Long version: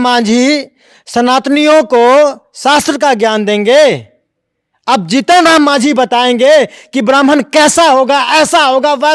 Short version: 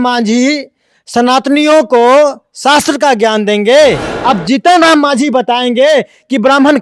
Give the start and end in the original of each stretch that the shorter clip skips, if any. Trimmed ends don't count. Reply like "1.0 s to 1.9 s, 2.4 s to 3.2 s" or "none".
4.1 s to 4.7 s

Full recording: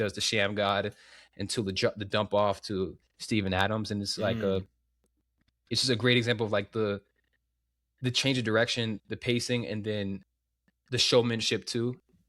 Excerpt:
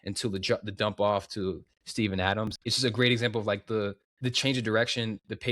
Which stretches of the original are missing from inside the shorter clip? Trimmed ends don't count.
3.9 s to 5.6 s, 7.1 s to 7.9 s

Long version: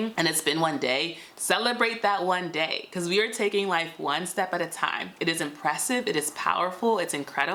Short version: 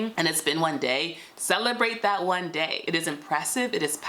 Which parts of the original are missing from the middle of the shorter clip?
2.8 s to 5.1 s

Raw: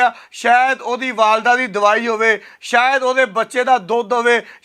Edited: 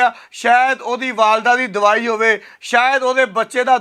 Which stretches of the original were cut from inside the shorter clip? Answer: none

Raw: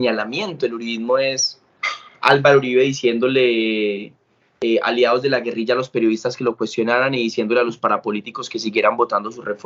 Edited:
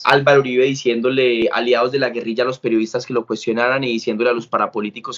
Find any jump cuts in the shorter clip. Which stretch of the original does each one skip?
3.6 s to 4.7 s

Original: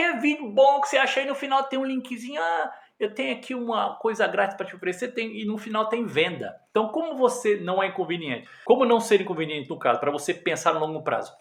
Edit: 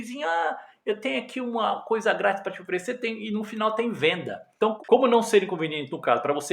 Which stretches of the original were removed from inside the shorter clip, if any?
6.9 s to 8.6 s

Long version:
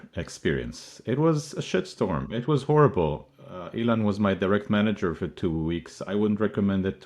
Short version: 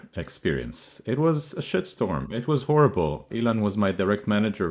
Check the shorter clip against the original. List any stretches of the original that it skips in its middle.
3.2 s to 3.7 s

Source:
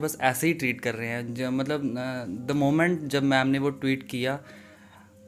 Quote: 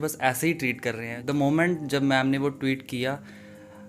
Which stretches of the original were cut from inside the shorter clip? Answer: 1.1 s to 2.3 s

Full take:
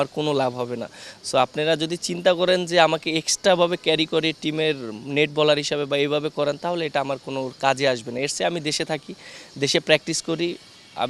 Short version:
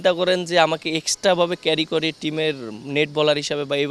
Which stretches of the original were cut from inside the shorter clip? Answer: none

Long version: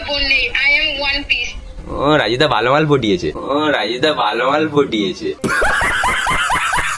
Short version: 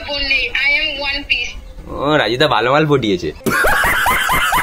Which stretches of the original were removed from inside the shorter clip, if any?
3.4 s to 5.4 s

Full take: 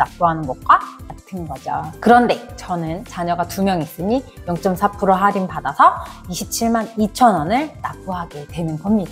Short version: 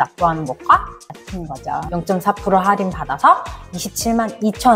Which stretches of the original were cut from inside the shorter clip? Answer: 1.9 s to 4.4 s

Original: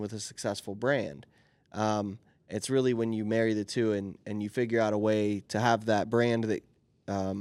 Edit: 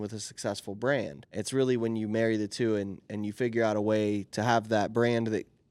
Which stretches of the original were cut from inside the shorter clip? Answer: 1.2 s to 2.4 s

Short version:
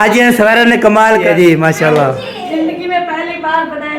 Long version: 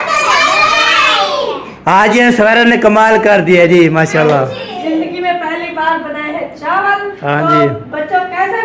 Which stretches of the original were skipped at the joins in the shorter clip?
2.9 s to 3.2 s

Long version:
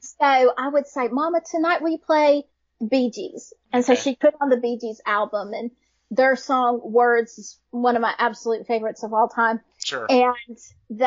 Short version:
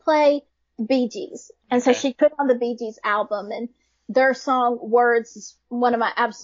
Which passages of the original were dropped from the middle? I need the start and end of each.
none

